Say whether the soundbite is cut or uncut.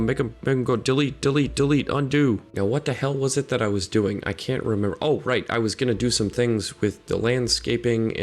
cut